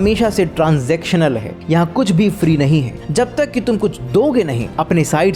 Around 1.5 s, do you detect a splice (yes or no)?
no